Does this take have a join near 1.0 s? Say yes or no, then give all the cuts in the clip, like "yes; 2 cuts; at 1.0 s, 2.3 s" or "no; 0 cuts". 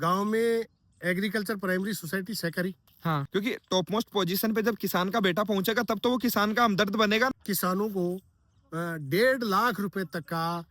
no; 2 cuts; at 3.2 s, 7.3 s